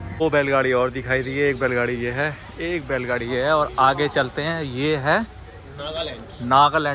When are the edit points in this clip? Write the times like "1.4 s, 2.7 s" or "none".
none